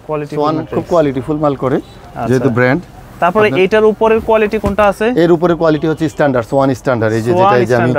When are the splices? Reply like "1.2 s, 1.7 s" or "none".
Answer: none